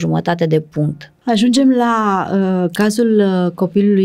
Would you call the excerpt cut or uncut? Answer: cut